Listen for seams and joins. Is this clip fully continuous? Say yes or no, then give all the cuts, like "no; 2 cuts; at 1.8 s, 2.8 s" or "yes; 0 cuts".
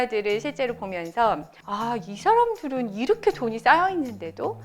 no; 1 cut; at 1.5 s